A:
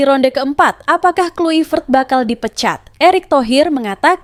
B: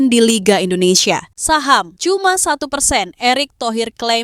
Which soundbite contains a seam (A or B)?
B